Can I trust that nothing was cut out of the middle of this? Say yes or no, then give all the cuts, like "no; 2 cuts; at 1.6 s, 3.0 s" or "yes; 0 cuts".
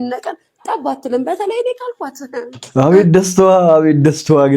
yes; 0 cuts